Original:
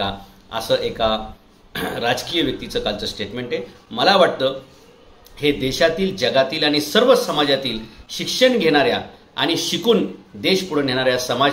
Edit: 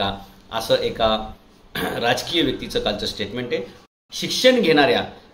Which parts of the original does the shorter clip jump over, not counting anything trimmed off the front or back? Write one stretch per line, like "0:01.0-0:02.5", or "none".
0:03.8-0:07.8